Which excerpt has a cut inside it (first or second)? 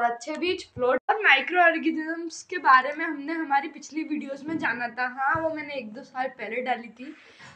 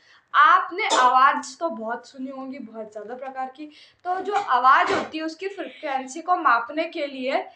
first